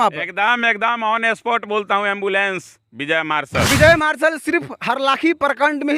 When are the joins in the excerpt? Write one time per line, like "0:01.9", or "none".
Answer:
0:03.7